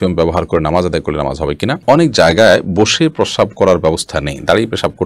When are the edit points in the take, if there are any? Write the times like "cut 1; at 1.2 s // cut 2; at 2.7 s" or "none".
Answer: cut 1; at 1.8 s